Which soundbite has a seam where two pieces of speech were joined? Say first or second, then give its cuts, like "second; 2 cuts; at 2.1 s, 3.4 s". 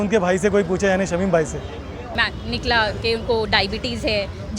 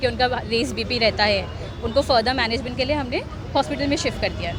first; 1 cut; at 2.1 s